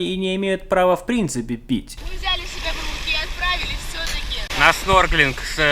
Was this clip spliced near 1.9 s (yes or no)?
yes